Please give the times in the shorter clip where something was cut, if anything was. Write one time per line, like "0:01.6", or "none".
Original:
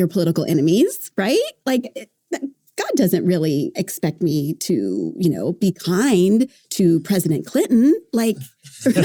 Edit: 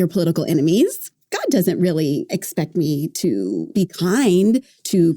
0:01.0
0:03.7

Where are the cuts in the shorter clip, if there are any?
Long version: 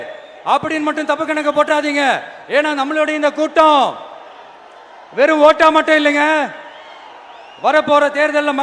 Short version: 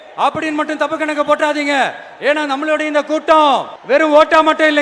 0:03.7

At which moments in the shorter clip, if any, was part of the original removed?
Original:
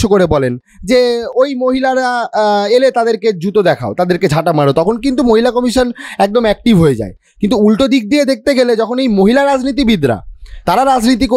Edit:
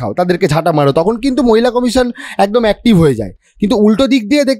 none

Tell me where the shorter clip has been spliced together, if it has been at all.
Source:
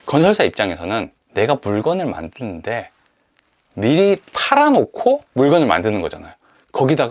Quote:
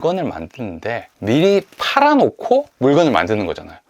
0:01.1

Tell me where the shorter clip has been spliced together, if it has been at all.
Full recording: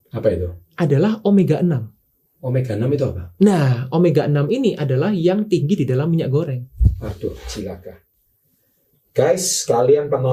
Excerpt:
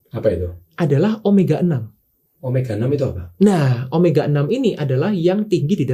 none

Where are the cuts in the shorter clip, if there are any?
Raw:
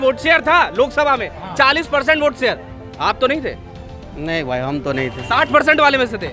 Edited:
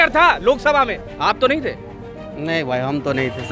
0:01.0

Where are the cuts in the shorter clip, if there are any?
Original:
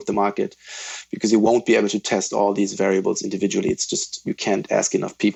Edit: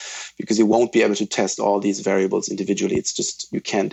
none

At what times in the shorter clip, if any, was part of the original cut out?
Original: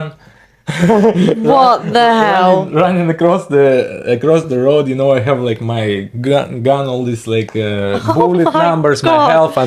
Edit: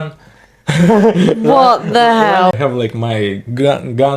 0:02.5

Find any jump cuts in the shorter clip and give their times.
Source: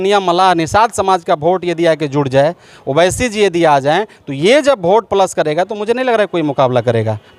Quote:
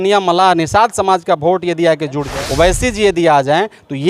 0:02.2

